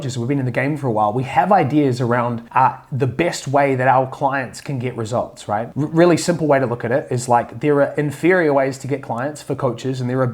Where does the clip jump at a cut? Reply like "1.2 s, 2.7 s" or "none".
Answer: none